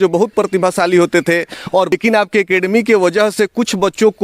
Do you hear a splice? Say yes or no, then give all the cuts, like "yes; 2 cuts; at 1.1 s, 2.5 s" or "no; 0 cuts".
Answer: yes; 1 cut; at 1.9 s